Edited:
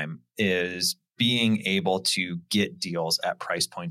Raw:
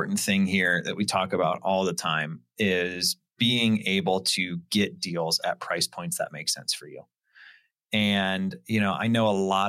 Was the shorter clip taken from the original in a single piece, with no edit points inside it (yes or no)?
yes